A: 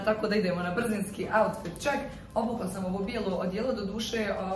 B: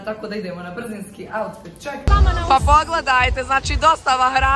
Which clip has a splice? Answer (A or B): B